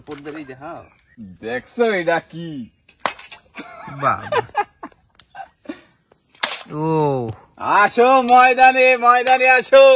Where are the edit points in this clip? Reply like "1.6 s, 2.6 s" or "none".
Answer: 1.0 s